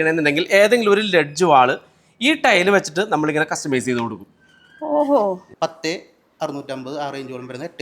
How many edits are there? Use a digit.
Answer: 1